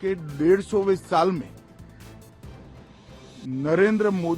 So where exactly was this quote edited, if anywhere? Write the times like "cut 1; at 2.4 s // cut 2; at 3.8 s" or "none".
cut 1; at 1.7 s // cut 2; at 3.4 s